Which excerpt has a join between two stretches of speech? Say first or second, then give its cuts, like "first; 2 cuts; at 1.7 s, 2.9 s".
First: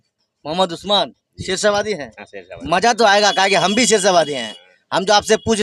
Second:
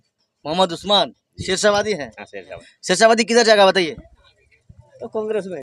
second; 1 cut; at 2.5 s